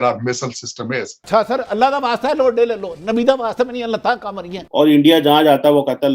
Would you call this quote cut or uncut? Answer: cut